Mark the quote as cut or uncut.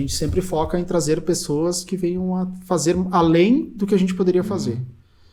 uncut